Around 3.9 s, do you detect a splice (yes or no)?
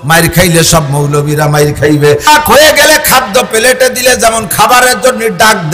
no